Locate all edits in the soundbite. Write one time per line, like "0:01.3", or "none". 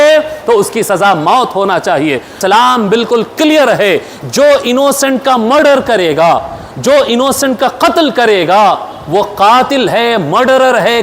0:02.3